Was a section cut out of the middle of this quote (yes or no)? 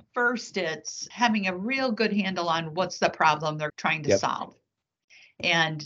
yes